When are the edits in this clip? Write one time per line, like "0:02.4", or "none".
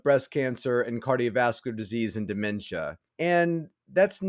0:03.0